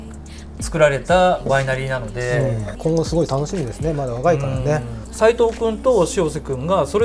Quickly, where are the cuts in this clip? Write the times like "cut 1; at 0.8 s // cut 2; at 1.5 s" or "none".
cut 1; at 2.8 s // cut 2; at 5.0 s